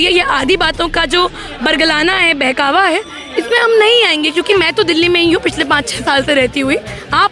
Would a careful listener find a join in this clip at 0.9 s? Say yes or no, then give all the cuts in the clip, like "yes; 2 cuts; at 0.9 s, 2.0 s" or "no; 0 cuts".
no; 1 cut; at 4.5 s